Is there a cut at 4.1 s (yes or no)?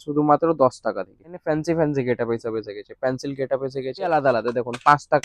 yes